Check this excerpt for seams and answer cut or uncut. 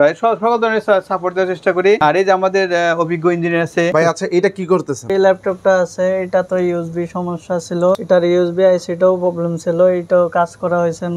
cut